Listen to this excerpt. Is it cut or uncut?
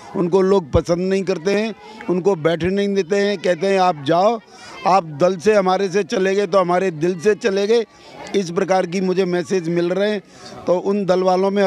uncut